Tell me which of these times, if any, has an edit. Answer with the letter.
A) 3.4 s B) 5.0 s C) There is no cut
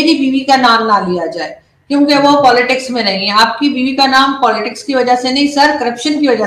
C